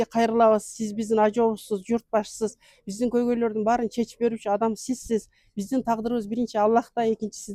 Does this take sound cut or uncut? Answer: uncut